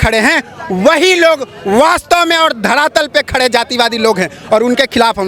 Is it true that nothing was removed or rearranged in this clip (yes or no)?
yes